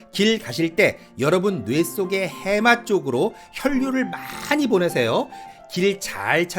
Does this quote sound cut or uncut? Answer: cut